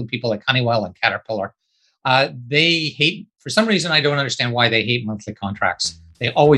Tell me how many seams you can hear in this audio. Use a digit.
0